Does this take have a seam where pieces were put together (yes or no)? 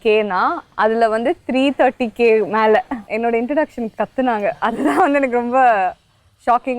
yes